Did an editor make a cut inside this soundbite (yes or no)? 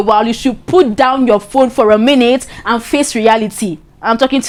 no